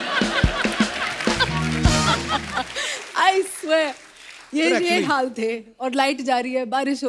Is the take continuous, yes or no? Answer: yes